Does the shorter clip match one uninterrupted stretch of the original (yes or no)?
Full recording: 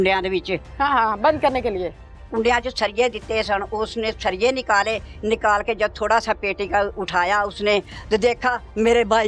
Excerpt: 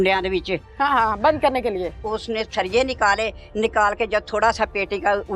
no